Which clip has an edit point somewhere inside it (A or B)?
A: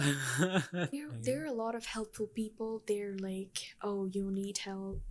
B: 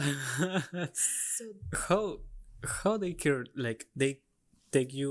A